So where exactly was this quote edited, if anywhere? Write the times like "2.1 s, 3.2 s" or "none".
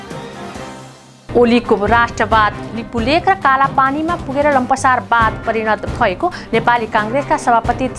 1.1 s